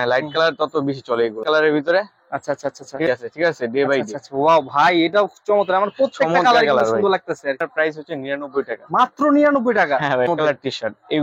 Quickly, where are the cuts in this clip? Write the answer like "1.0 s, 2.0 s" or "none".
1.4 s, 3.1 s, 7.6 s, 10.3 s

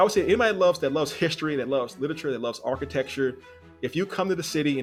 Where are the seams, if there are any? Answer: none

